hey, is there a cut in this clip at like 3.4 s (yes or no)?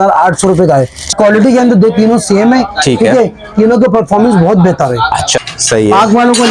no